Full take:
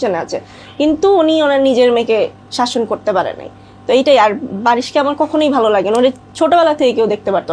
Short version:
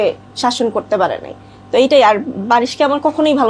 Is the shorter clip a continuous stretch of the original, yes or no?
yes